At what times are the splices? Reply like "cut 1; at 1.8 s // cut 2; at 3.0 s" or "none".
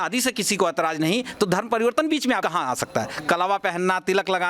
cut 1; at 2.7 s